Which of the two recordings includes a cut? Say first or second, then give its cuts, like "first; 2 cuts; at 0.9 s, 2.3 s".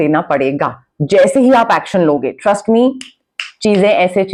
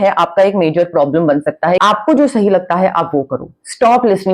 second; 1 cut; at 1.8 s